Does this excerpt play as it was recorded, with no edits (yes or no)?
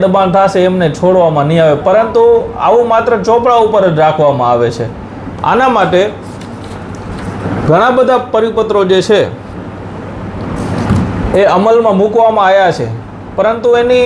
yes